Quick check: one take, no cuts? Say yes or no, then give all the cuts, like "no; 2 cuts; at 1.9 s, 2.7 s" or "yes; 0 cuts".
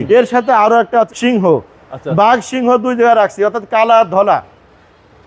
no; 1 cut; at 1.1 s